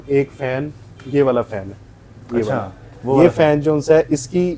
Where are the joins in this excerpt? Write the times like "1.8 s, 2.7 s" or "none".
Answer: none